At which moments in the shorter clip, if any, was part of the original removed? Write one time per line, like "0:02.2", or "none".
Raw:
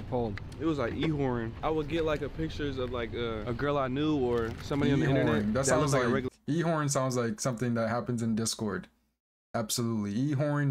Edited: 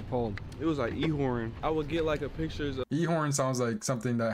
0:02.8

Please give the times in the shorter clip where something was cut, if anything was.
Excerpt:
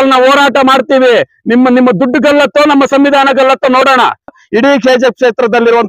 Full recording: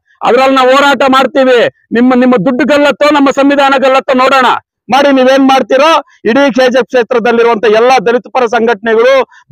0:04.4

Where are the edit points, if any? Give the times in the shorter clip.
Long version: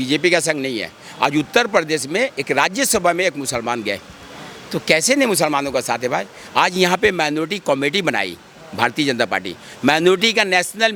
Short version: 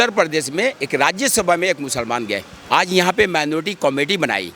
0:02.5

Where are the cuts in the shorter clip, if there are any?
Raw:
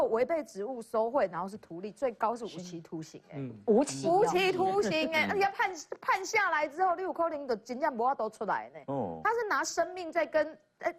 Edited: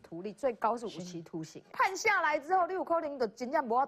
0:01.6

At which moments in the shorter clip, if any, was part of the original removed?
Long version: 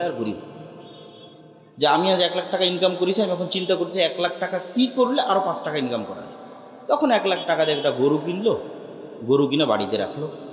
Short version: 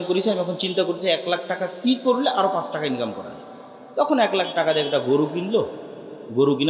none

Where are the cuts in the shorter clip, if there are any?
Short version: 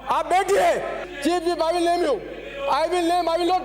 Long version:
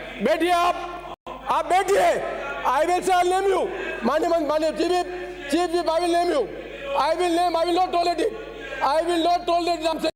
0:01.0

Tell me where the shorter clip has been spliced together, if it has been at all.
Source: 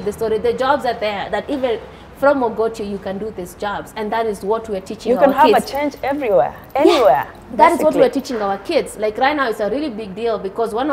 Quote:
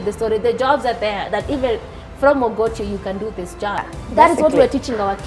0:03.9

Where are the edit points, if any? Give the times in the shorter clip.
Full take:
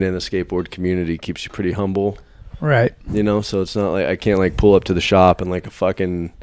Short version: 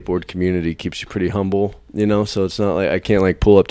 0:01.8

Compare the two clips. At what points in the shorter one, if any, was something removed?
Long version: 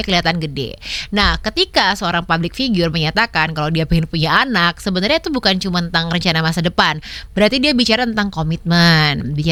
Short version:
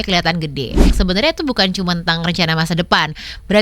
0:00.9

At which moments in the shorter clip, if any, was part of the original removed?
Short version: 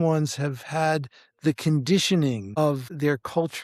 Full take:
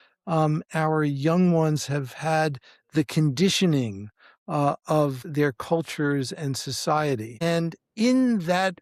0:02.5

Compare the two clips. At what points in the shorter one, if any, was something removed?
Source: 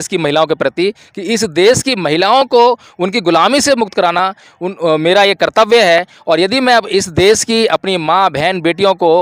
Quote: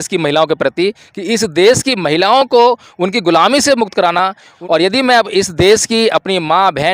0:04.6

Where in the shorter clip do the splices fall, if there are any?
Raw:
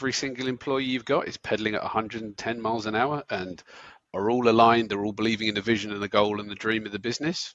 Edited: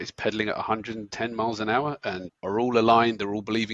0:02.3

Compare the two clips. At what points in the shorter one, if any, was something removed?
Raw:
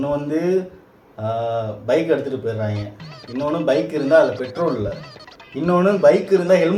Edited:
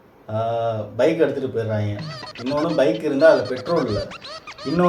none

